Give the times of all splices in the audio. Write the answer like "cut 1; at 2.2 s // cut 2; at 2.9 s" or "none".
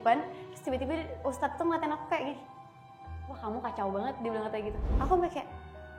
cut 1; at 4.9 s